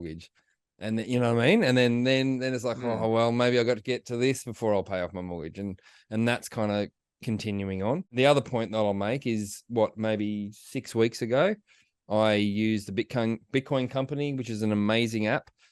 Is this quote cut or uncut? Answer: uncut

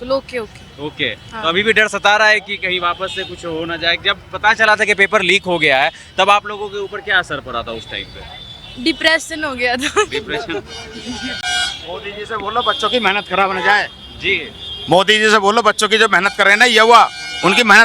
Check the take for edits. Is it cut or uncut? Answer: cut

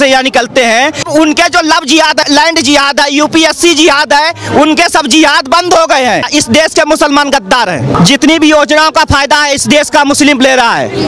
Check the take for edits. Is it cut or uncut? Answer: cut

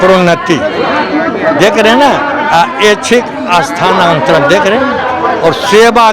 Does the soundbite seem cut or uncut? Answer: uncut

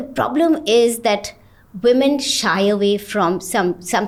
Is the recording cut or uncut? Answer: uncut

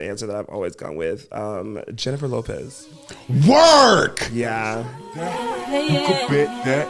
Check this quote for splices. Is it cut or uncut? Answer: cut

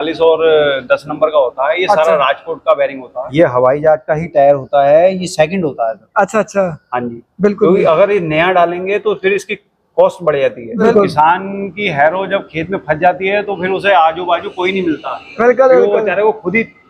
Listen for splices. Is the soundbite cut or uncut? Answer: cut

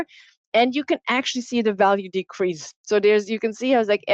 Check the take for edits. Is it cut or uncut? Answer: uncut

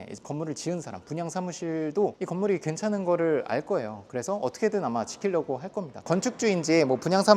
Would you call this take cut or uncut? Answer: cut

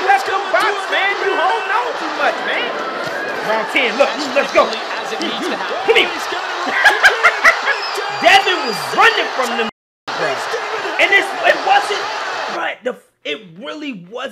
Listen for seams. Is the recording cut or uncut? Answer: uncut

